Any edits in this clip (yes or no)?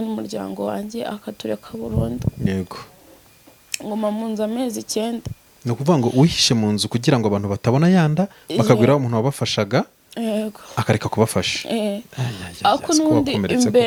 no